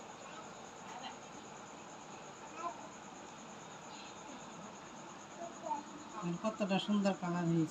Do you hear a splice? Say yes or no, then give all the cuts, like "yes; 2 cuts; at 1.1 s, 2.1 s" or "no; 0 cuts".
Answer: no; 0 cuts